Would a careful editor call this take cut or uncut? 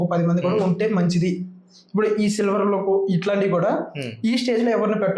uncut